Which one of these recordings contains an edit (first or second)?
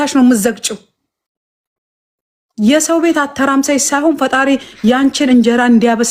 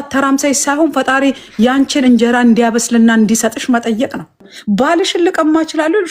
second